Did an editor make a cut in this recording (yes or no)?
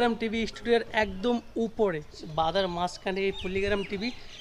yes